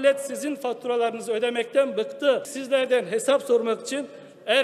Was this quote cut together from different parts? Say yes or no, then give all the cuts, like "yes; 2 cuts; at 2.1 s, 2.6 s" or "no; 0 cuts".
yes; 1 cut; at 2.6 s